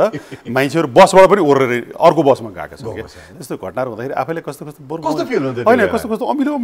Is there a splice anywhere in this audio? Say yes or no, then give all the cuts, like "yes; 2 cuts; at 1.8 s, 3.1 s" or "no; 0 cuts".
no; 0 cuts